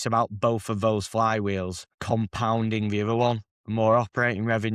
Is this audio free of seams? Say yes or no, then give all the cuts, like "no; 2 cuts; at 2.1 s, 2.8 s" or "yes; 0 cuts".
no; 2 cuts; at 1.9 s, 3.5 s